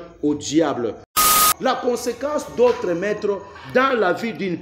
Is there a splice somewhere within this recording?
yes; 1 cut; at 1.2 s

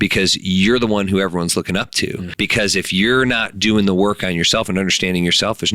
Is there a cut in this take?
yes; 1 cut; at 2.2 s

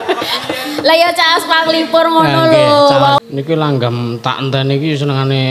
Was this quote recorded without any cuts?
no; 1 cut; at 3.2 s

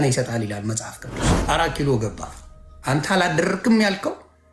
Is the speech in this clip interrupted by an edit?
yes; 2 cuts; at 1.4 s, 2.7 s

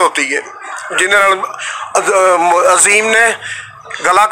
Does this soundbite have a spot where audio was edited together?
no; 0 cuts

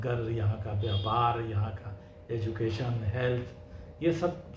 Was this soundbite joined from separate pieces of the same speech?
no; 0 cuts

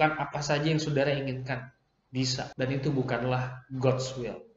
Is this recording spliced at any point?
yes; 1 cut; at 2.5 s

